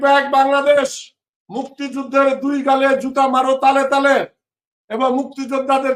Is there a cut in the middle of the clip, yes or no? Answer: no